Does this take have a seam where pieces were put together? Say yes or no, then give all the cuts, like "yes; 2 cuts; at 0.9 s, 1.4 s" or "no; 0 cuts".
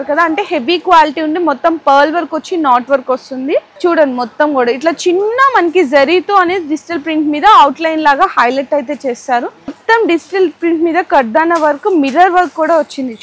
yes; 2 cuts; at 3.7 s, 9.8 s